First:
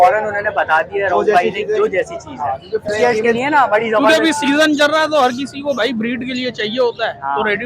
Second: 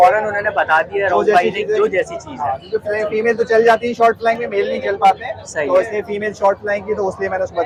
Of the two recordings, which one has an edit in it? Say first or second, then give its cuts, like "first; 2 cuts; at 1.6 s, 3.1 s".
first; 1 cut; at 3.1 s